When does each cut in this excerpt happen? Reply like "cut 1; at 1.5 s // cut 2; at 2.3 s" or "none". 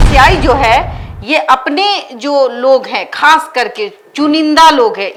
none